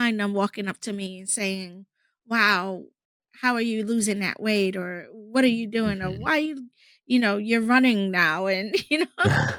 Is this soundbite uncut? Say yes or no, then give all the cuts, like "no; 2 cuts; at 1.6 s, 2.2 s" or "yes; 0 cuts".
yes; 0 cuts